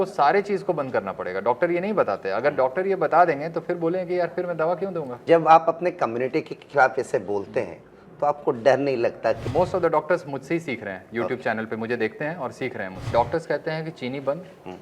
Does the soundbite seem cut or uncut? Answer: cut